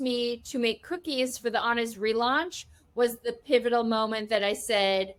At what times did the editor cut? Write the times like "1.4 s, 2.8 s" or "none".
none